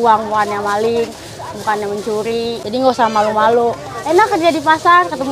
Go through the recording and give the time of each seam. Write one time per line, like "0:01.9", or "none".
0:02.6